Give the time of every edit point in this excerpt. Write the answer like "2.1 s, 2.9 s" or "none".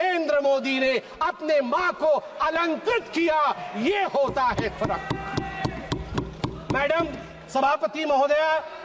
none